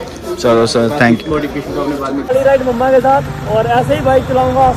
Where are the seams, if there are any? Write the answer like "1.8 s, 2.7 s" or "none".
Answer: 2.3 s